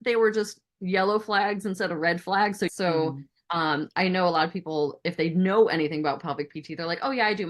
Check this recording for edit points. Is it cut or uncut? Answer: cut